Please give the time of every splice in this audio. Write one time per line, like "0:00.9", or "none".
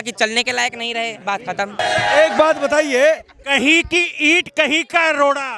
none